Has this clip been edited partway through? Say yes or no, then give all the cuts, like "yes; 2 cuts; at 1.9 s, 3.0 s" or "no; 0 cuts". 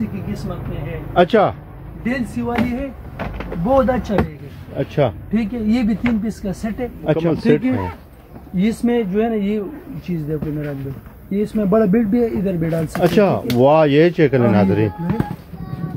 yes; 1 cut; at 7.2 s